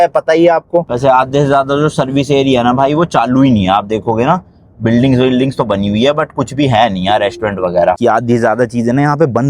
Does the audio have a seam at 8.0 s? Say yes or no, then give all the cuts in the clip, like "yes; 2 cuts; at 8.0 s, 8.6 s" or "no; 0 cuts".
yes; 2 cuts; at 0.8 s, 8.0 s